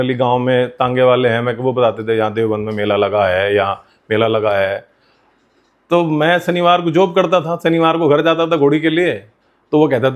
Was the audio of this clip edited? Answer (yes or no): no